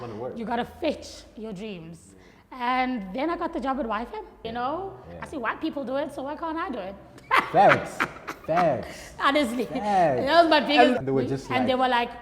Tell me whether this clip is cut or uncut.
cut